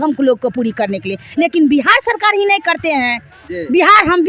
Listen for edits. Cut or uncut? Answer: uncut